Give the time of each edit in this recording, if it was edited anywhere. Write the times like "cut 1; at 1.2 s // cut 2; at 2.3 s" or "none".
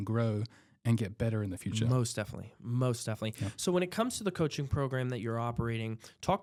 none